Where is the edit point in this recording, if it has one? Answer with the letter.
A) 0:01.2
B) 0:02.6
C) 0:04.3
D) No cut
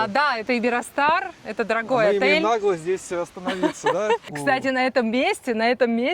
C